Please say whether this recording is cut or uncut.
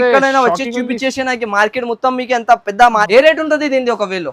cut